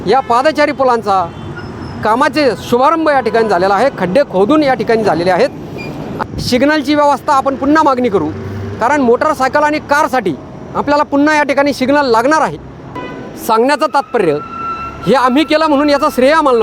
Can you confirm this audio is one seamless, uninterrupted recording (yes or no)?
no